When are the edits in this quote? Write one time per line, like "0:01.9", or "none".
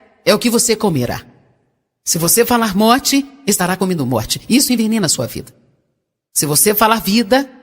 0:02.1